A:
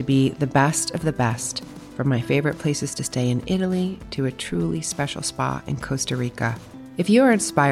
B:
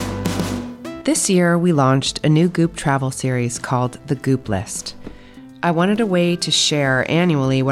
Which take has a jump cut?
B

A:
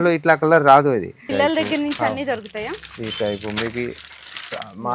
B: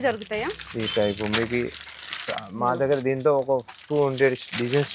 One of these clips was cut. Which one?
A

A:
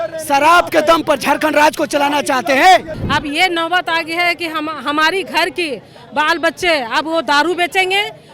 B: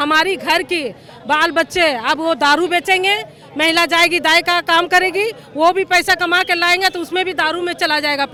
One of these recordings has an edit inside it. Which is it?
A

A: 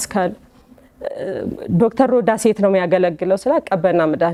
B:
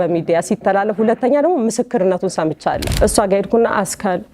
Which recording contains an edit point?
B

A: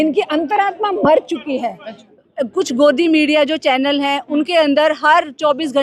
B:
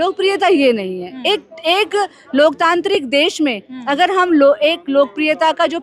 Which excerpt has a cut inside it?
A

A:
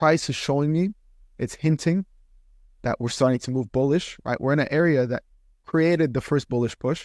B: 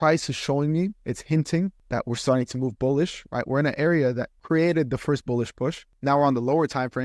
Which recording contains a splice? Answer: B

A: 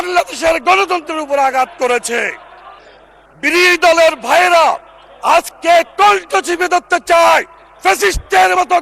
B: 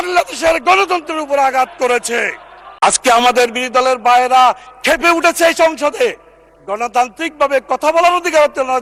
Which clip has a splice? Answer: A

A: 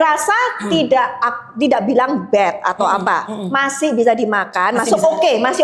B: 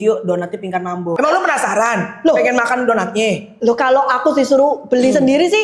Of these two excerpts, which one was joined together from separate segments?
B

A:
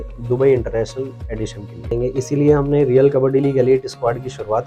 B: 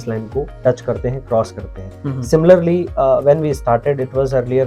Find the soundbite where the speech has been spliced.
A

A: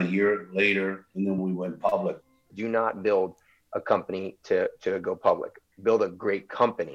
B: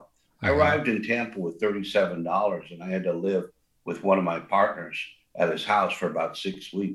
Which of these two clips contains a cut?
A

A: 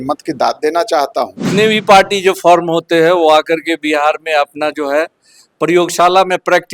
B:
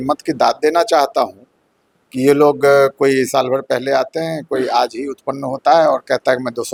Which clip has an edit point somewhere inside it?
A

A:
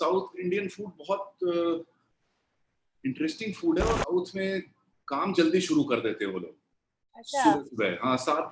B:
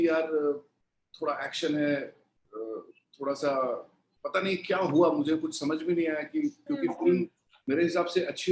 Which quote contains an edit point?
A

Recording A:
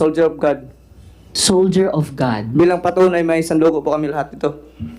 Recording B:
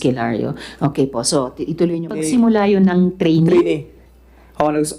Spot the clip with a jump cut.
B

